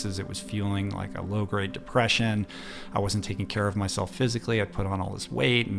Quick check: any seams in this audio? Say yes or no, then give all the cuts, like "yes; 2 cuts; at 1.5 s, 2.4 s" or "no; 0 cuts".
no; 0 cuts